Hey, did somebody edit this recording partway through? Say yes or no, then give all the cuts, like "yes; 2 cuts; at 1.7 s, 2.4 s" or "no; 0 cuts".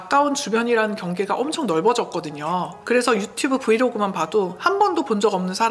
yes; 1 cut; at 2.7 s